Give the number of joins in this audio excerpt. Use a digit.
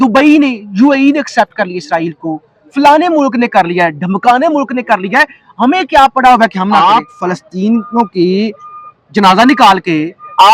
1